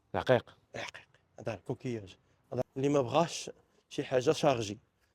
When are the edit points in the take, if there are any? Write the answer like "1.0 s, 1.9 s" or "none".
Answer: 2.6 s